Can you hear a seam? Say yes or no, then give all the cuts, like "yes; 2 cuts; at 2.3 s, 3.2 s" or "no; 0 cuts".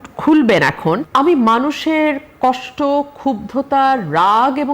yes; 1 cut; at 1.0 s